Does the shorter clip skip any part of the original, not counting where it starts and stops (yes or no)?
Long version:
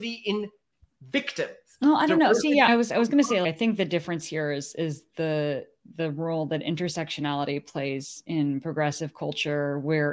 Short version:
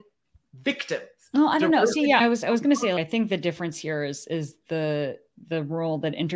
no